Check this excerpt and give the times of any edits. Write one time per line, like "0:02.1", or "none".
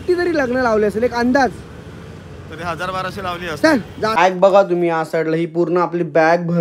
0:04.2